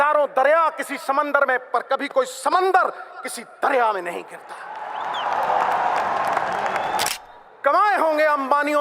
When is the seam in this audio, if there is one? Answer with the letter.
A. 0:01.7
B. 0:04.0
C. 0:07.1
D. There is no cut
C